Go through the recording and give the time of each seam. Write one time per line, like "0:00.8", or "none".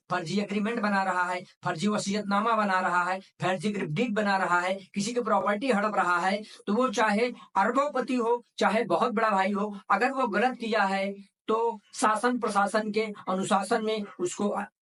none